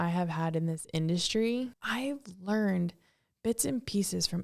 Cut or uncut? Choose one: cut